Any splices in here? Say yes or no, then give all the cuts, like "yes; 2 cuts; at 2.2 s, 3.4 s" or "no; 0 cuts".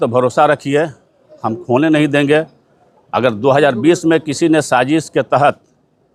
no; 0 cuts